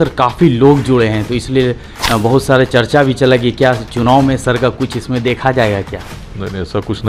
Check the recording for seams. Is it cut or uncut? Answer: uncut